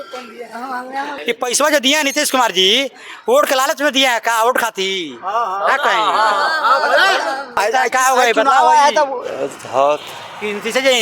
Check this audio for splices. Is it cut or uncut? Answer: cut